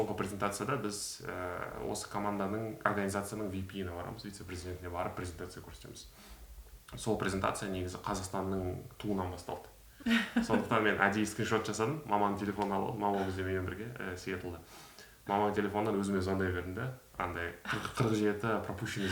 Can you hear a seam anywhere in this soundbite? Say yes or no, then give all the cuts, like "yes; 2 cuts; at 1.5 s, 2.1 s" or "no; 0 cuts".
yes; 1 cut; at 9.8 s